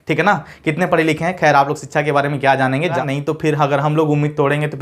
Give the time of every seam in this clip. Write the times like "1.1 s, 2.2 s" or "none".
3.0 s

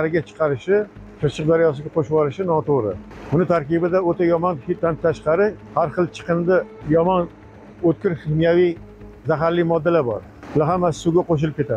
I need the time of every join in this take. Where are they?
1.0 s, 3.1 s, 4.8 s, 5.6 s, 6.8 s, 10.3 s

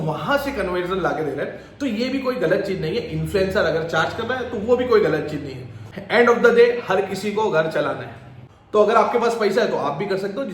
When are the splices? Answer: 8.5 s

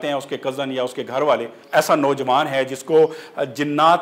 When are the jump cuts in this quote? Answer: 1.6 s

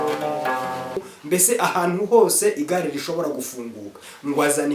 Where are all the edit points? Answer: 1.1 s

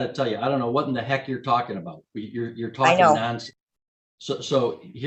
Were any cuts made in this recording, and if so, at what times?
none

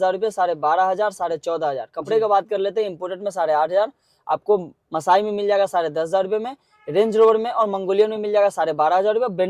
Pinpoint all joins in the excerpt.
none

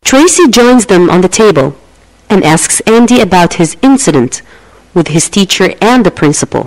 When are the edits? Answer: none

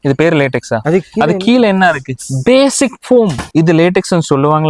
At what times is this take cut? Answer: 3.4 s

